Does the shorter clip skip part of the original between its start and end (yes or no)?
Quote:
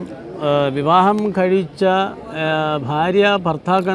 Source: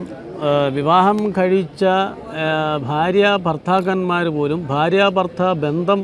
no